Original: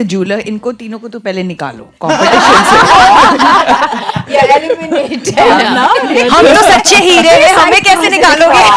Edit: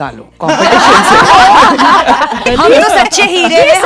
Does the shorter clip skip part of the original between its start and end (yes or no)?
yes